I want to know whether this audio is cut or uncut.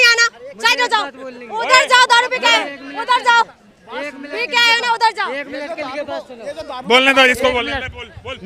uncut